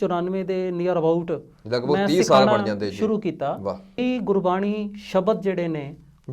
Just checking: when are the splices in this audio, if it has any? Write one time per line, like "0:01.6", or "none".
0:04.0